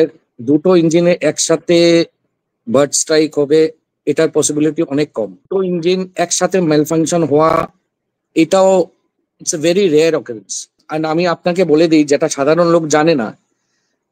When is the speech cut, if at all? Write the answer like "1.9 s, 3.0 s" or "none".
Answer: 5.5 s, 10.9 s